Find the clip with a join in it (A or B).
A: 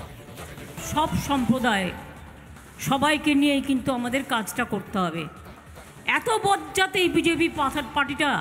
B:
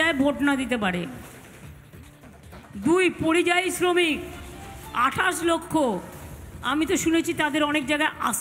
A